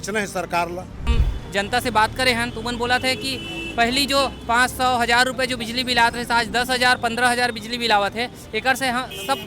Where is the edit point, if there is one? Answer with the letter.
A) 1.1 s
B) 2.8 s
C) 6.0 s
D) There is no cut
A